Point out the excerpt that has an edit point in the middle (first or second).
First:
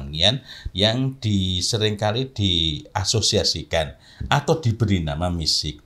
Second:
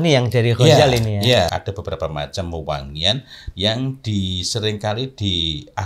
second